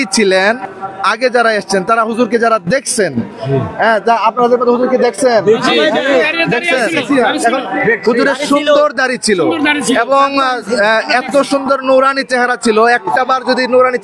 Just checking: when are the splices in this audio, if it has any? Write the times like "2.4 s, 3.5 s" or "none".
none